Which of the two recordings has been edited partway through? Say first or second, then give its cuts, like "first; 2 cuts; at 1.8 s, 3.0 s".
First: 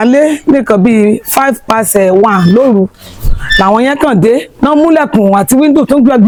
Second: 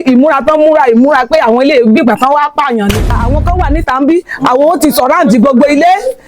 second; 1 cut; at 3.2 s